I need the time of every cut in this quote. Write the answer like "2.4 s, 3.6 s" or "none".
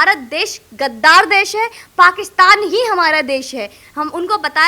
none